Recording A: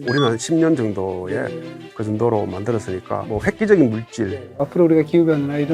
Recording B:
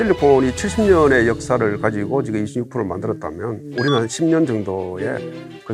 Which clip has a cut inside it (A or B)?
A